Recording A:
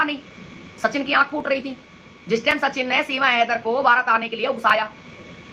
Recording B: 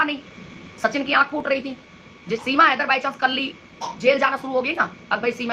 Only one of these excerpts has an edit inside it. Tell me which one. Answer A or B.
B